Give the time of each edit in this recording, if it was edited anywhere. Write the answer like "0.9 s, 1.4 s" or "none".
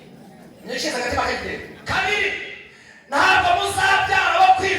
1.7 s